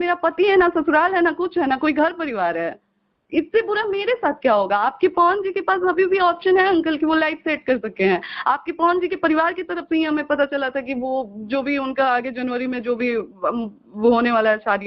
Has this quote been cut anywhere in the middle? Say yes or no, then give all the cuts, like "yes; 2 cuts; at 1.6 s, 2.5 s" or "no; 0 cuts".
no; 0 cuts